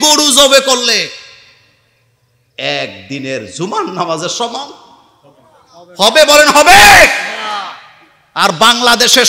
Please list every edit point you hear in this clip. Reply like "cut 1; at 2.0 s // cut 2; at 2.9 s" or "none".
none